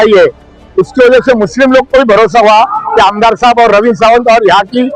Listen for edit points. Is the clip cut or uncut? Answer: uncut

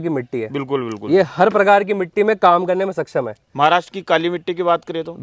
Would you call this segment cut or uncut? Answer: uncut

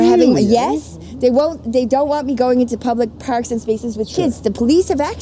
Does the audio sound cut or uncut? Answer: uncut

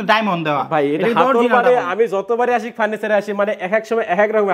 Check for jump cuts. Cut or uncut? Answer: uncut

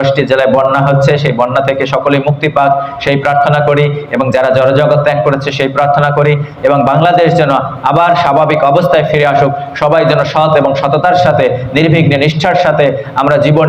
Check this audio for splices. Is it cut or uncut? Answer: uncut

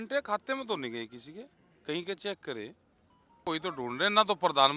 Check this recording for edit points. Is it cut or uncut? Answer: cut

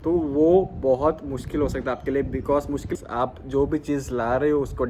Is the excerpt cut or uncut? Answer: cut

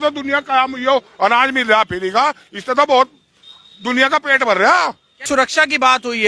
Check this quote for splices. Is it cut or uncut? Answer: cut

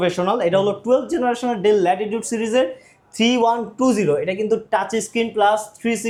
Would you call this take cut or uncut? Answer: uncut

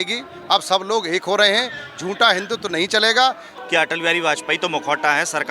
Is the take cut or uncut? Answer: cut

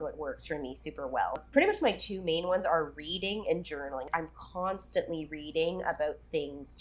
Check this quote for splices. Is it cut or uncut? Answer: cut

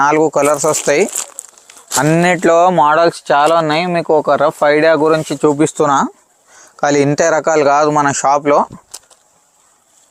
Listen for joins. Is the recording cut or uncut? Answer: uncut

